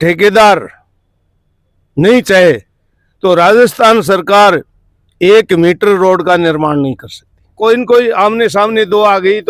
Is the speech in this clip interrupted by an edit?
yes; 1 cut; at 7.5 s

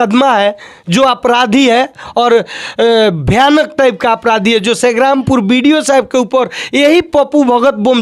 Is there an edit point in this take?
no; 0 cuts

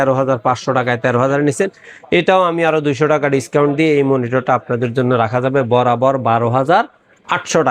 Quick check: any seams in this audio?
no; 0 cuts

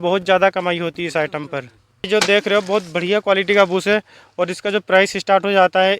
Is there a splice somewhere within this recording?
yes; 1 cut; at 2.0 s

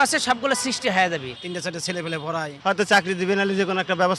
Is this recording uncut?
no; 2 cuts; at 1.3 s, 2.5 s

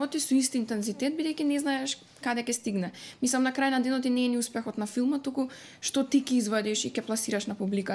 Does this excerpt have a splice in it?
no; 0 cuts

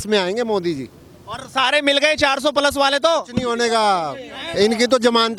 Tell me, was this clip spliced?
no; 0 cuts

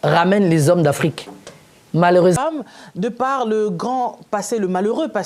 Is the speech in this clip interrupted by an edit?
yes; 1 cut; at 2.4 s

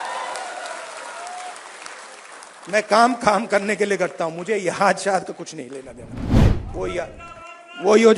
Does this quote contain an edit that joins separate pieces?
no; 0 cuts

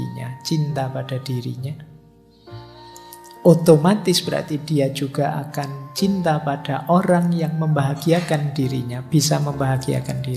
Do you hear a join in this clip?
no; 0 cuts

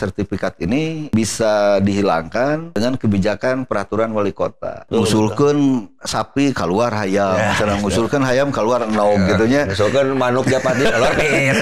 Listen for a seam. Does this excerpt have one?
yes; 3 cuts; at 1.1 s, 2.7 s, 4.8 s

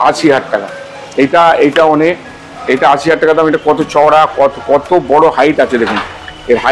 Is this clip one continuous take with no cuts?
yes; 0 cuts

